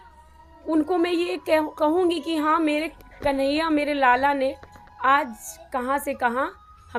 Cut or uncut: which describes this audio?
uncut